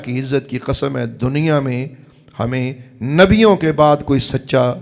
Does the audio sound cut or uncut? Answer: uncut